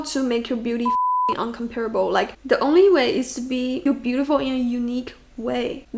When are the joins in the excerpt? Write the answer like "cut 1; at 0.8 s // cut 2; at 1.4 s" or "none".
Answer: cut 1; at 3.8 s